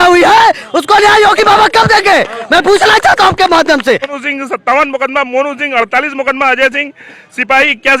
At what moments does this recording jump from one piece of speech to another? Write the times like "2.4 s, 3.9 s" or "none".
4.2 s